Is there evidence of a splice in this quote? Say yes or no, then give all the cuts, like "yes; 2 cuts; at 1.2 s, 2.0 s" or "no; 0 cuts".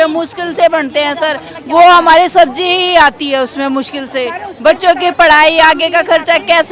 no; 0 cuts